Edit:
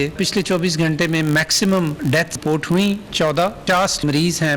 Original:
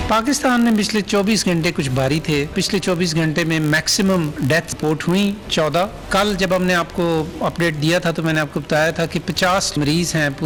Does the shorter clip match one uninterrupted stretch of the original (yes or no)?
no